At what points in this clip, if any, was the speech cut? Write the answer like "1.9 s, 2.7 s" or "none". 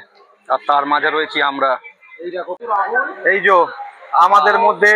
2.6 s